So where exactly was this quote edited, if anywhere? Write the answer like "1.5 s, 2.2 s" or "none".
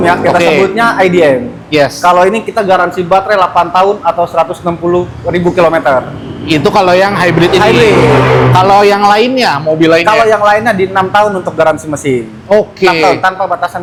none